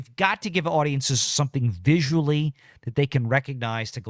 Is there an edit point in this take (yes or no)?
no